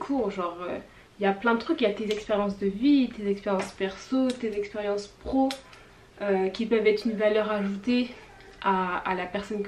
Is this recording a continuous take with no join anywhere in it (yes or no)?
yes